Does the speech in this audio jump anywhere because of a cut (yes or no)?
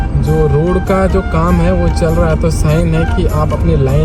no